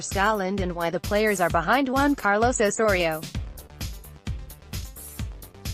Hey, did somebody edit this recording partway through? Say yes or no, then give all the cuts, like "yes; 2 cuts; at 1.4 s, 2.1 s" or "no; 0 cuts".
yes; 2 cuts; at 3.2 s, 4.8 s